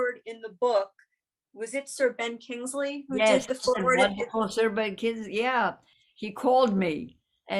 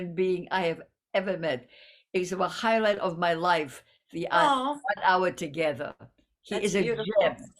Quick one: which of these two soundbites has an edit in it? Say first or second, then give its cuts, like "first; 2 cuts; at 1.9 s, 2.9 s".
first; 1 cut; at 5.9 s